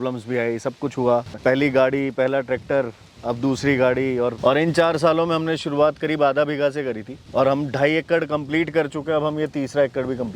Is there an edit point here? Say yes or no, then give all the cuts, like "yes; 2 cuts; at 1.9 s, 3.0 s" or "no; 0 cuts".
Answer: yes; 2 cuts; at 1.3 s, 4.4 s